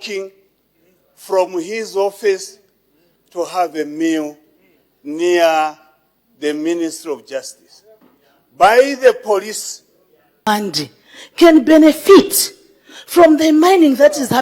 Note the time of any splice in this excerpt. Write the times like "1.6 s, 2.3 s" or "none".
10.5 s